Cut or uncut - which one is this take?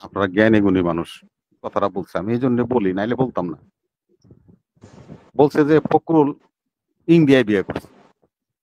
cut